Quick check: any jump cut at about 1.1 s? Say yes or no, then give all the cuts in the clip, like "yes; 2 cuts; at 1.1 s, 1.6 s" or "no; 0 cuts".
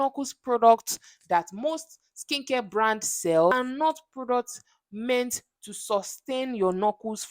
no; 1 cut; at 3.5 s